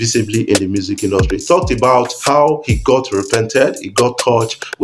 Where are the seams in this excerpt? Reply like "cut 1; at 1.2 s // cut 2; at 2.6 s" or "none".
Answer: cut 1; at 2.2 s